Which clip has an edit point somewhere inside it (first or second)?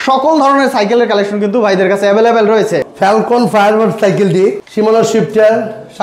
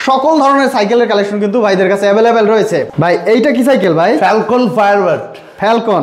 first